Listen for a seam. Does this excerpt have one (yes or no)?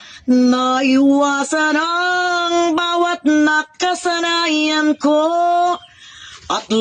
no